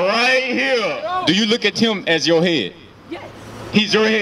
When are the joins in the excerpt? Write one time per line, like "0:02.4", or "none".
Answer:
0:01.0